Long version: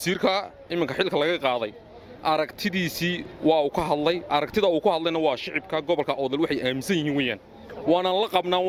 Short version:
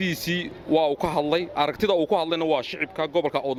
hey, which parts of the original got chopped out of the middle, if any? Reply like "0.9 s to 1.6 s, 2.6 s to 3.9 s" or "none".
none